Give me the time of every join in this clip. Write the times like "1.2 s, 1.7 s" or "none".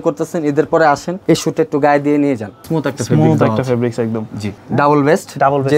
1.1 s, 2.7 s, 4.6 s